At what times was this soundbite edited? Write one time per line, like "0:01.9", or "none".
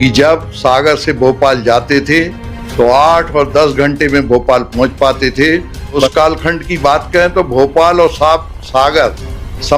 0:06.1